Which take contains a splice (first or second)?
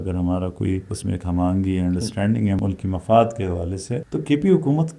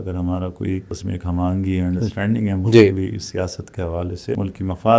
first